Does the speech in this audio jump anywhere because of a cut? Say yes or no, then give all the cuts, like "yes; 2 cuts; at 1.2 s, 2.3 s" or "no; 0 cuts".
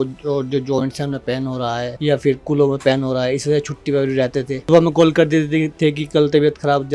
yes; 2 cuts; at 1.9 s, 4.6 s